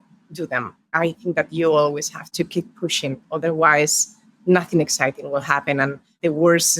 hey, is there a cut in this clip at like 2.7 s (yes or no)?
no